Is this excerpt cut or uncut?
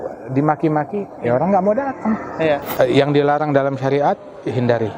cut